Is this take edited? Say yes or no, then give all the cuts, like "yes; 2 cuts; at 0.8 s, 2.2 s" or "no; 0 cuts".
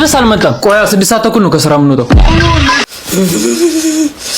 yes; 1 cut; at 2.8 s